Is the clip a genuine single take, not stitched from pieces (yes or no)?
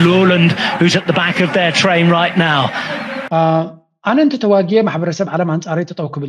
no